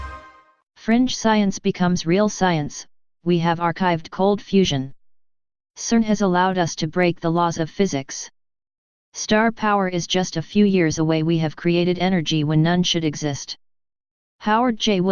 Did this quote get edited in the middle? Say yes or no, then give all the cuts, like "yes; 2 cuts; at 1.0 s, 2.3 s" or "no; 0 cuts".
no; 0 cuts